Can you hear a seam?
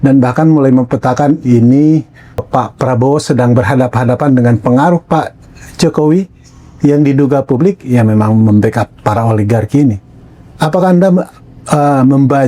yes; 1 cut; at 2.5 s

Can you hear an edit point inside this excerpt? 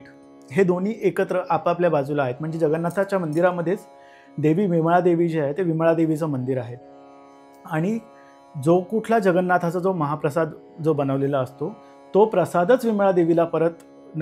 no; 0 cuts

